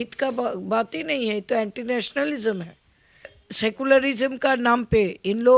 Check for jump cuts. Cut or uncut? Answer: cut